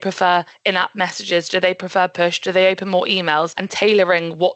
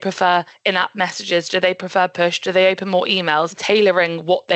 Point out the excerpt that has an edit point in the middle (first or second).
second